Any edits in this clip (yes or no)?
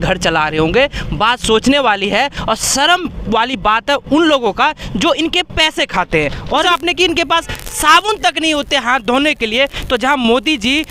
yes